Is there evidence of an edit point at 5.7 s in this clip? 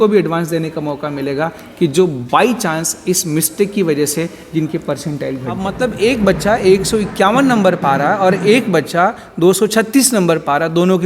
yes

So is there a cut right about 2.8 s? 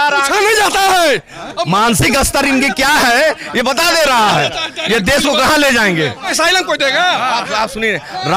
no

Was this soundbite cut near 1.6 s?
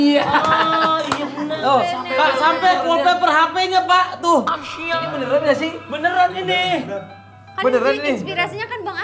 yes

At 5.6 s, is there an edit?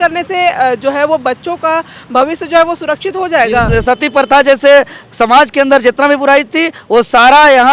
no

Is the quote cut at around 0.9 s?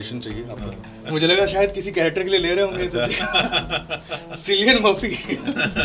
yes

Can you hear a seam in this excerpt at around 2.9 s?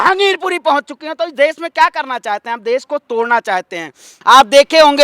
no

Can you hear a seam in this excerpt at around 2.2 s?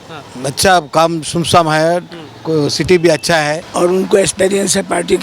no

